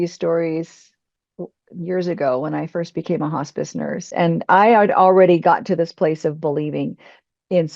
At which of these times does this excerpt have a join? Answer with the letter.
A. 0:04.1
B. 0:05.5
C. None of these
A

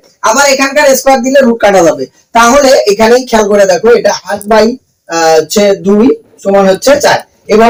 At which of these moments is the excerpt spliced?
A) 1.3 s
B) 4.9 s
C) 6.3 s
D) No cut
D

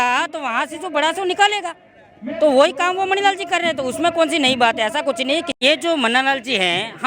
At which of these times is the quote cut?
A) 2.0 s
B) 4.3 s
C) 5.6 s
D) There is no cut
C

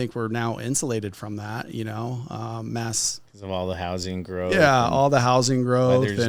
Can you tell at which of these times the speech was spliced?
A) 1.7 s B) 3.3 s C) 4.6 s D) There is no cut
D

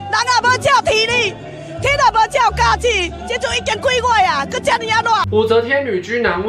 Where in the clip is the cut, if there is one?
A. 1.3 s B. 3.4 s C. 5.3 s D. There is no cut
C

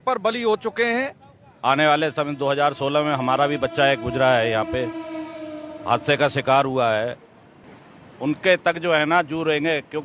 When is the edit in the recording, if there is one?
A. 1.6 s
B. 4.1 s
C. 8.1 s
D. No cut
A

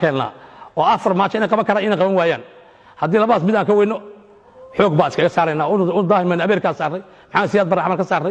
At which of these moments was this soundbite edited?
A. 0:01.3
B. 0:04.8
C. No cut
C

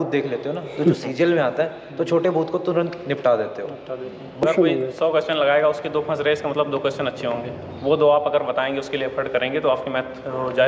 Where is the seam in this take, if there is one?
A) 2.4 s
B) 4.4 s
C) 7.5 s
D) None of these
B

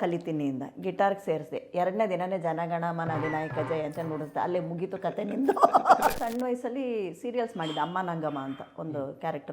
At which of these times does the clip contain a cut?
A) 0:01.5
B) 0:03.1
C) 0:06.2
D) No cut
C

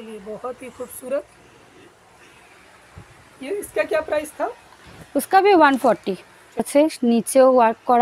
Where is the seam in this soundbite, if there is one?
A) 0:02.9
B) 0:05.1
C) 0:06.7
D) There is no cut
C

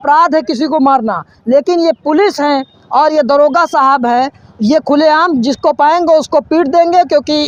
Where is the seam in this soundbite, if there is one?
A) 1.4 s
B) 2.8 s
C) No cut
C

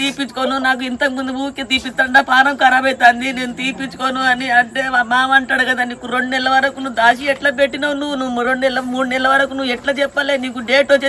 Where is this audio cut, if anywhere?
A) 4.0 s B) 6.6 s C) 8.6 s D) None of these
D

